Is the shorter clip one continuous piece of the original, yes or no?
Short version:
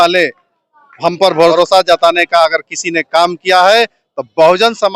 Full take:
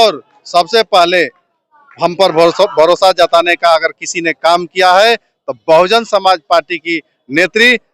no